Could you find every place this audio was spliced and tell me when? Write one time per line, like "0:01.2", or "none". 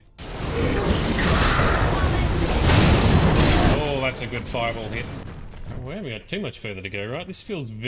0:05.2